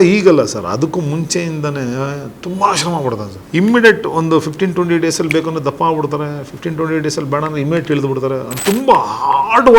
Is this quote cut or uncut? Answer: cut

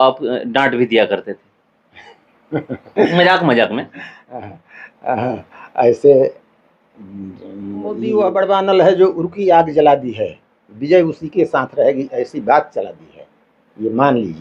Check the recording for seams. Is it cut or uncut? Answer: cut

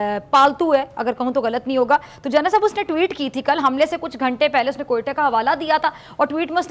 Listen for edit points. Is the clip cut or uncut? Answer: uncut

